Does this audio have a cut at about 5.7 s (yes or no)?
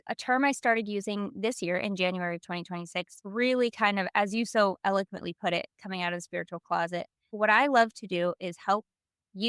no